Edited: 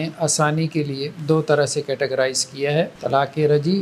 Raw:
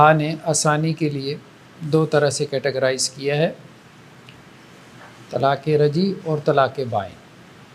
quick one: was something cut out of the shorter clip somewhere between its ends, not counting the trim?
yes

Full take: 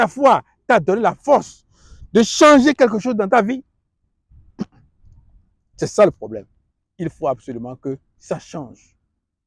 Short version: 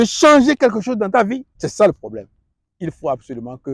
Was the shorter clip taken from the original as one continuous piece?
no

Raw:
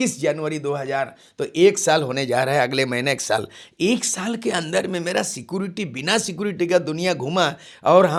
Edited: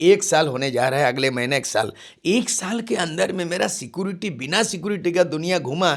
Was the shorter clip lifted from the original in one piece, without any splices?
yes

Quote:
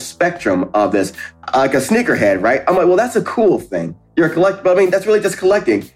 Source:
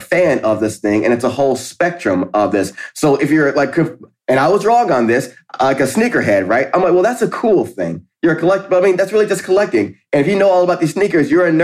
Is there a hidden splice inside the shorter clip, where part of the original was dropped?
yes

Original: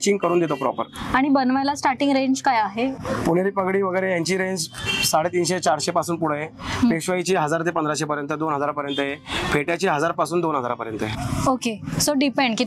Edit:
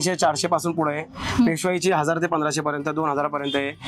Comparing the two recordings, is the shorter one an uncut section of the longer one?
yes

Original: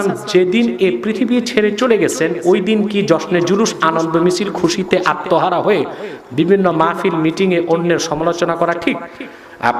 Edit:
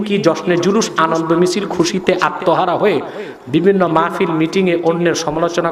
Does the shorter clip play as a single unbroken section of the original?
yes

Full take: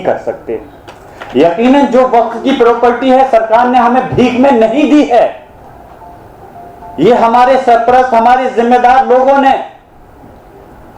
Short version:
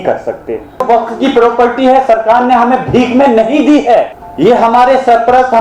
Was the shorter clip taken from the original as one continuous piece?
no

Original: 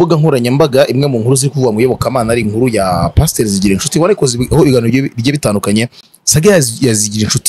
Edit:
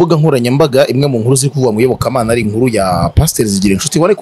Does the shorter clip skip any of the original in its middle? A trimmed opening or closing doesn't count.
no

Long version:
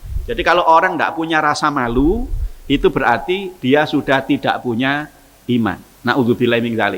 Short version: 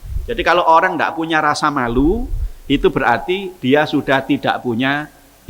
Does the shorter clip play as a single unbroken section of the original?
yes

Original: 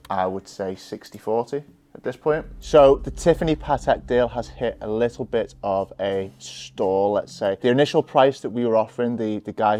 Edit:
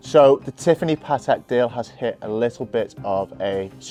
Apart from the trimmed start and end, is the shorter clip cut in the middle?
no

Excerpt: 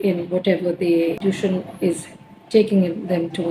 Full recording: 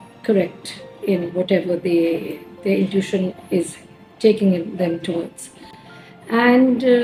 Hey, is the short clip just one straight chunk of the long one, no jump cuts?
no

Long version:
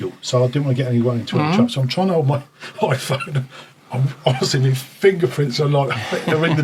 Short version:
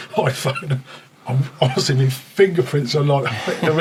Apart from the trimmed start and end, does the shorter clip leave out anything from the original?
no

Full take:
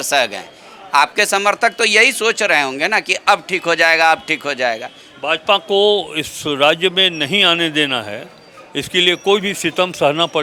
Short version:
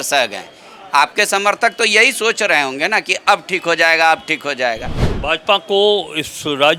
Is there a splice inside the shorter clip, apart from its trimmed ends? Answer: no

